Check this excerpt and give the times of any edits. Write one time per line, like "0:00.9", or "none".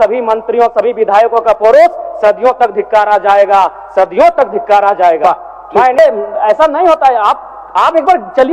0:06.0

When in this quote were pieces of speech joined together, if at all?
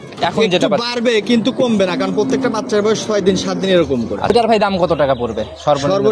0:04.3

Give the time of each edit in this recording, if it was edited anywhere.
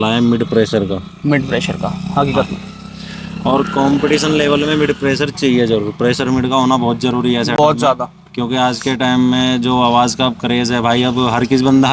none

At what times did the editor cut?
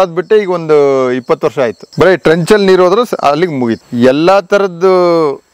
0:01.8
0:03.7

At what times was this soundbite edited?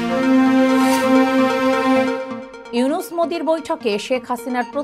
0:02.4

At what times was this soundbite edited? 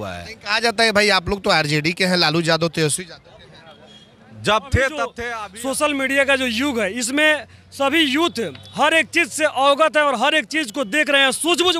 0:05.3

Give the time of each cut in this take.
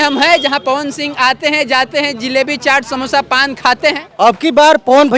0:04.0

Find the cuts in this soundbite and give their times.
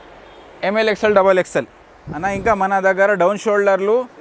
none

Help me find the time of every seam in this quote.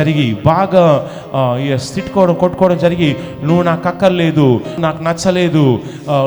0:04.8

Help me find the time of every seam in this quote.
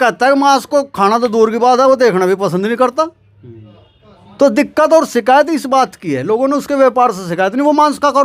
none

